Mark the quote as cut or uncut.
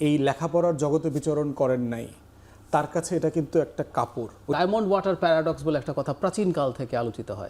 cut